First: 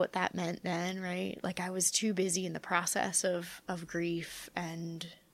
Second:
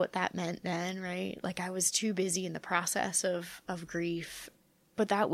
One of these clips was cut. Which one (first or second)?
second